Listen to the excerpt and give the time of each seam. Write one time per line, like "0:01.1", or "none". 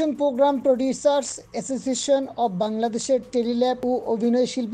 0:03.8